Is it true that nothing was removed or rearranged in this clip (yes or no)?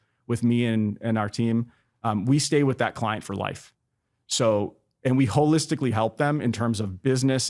yes